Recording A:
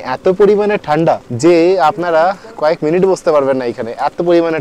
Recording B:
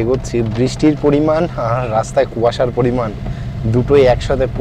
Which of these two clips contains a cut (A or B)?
A